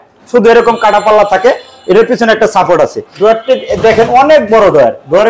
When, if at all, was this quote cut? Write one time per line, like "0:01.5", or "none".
0:03.1